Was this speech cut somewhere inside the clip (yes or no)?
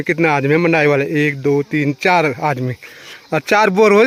no